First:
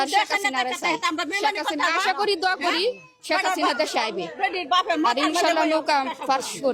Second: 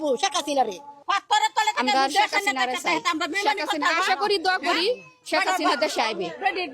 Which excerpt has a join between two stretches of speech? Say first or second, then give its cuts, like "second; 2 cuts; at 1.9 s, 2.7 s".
second; 1 cut; at 1.0 s